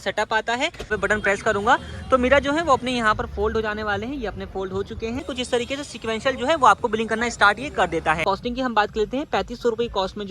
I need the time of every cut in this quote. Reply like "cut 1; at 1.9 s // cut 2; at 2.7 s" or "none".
cut 1; at 0.9 s // cut 2; at 5.2 s // cut 3; at 8.2 s